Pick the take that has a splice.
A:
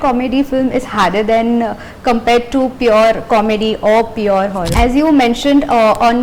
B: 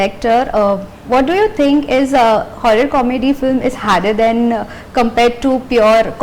A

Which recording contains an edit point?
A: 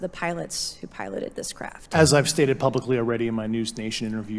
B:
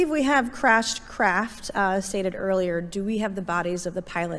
A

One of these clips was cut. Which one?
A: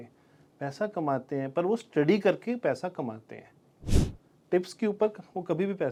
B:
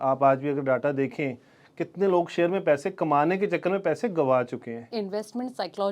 B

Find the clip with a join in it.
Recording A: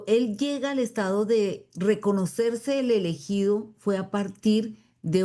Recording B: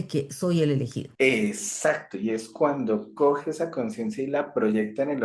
B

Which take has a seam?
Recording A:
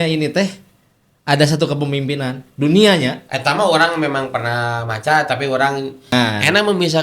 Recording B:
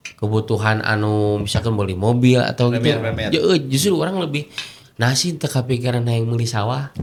A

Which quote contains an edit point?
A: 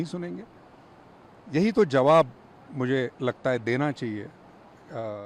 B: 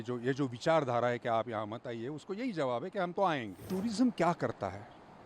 B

